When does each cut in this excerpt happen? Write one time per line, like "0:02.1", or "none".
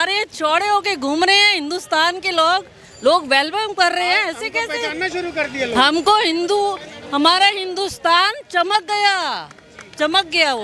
none